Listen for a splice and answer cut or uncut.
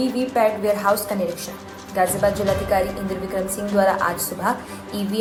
uncut